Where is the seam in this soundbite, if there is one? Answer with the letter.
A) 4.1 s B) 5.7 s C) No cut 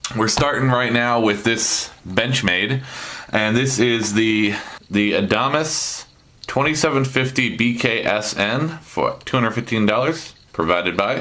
A